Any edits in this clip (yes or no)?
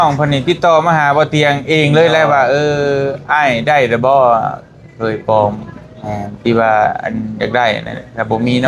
no